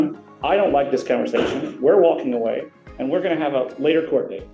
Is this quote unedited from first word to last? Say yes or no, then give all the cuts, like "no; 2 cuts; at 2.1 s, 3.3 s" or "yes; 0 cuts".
yes; 0 cuts